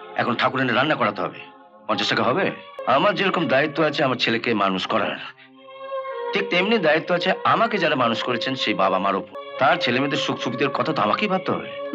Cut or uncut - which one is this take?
cut